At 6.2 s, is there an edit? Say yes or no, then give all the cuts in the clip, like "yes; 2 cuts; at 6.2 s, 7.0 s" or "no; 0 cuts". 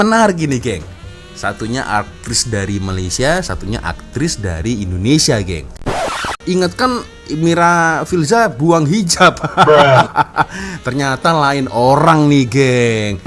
yes; 1 cut; at 6.2 s